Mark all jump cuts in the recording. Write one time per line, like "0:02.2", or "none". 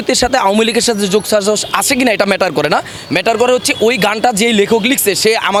none